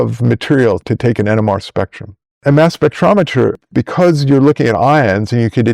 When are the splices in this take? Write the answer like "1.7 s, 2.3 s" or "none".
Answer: 2.4 s, 3.6 s